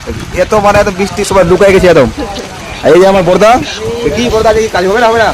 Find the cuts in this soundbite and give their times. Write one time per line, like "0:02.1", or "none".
none